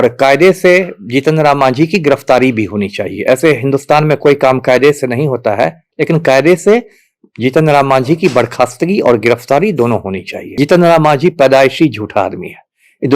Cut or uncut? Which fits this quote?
cut